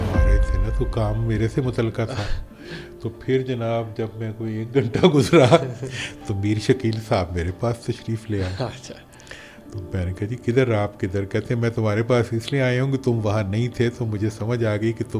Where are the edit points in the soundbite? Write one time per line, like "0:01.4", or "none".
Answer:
none